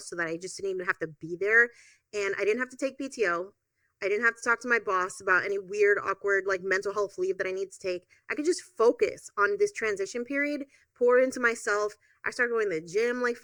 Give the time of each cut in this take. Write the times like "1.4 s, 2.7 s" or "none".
none